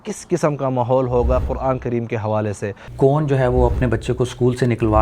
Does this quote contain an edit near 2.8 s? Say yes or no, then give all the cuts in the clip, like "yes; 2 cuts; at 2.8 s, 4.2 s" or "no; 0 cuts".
yes; 1 cut; at 2.8 s